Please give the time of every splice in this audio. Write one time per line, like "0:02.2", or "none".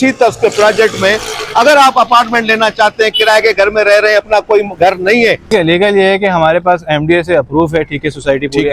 0:05.5

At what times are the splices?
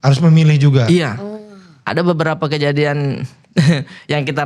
none

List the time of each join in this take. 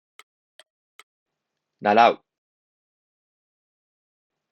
0:01.1

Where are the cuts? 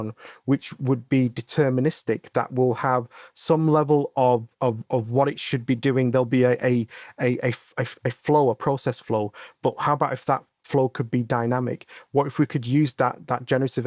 none

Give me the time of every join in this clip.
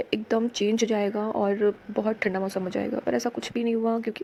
none

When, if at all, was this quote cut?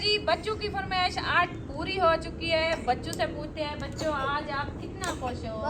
0:02.7

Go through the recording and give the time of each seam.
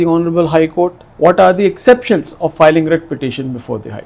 0:01.0

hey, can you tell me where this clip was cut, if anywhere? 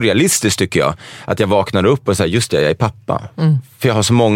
none

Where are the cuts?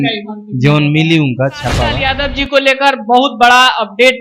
0:02.0

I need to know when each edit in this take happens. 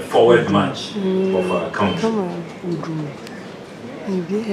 none

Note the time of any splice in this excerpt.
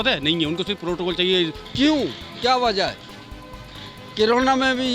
0:01.6

